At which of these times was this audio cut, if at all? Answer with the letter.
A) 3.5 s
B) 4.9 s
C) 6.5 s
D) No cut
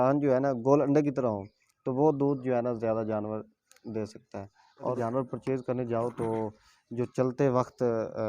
B